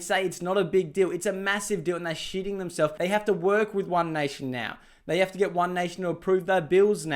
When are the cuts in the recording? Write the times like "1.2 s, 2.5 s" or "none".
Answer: 2.9 s